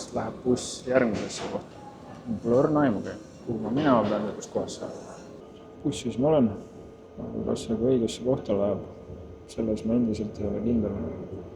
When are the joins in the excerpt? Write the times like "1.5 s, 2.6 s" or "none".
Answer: 5.4 s